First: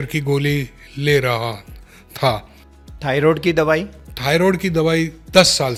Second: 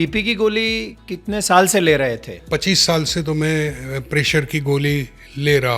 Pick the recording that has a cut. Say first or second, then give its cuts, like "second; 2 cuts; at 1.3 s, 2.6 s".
second; 2 cuts; at 0.9 s, 2.4 s